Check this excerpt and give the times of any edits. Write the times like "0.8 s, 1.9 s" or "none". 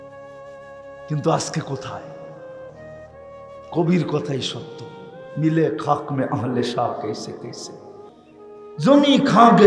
1.1 s

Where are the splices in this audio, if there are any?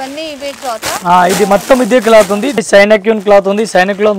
2.6 s

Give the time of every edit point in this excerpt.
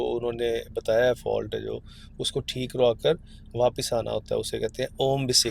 none

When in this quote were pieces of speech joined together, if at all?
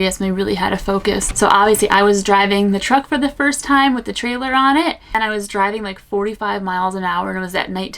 1.3 s, 5.1 s

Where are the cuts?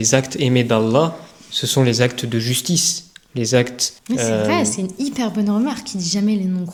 none

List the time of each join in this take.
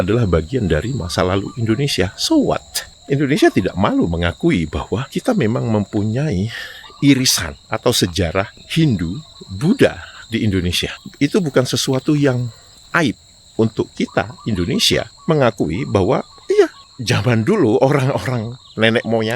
none

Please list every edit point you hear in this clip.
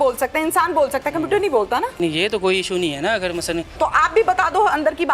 2.0 s, 3.7 s

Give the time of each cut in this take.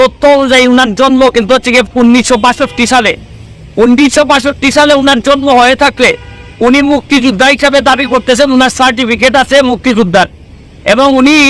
none

